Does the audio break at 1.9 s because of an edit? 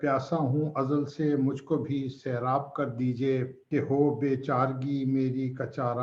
no; 1 cut; at 3.6 s

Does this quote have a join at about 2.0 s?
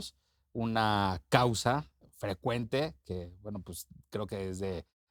yes; 1 cut; at 2.0 s

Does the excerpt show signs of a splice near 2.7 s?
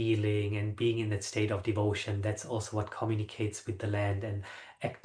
no; 0 cuts

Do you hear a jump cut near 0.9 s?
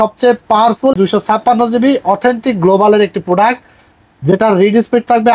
yes; 1 cut; at 0.9 s

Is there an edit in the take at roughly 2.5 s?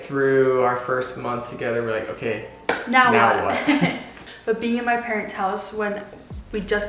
no; 1 cut; at 4.2 s

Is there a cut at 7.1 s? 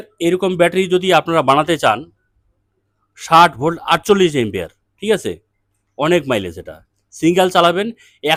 no; 0 cuts

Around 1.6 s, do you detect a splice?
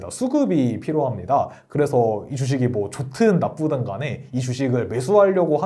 no; 0 cuts

